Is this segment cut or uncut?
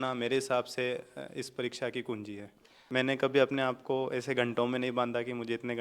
cut